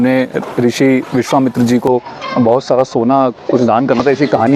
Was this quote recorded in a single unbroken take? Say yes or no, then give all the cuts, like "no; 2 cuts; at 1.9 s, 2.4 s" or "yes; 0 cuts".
yes; 0 cuts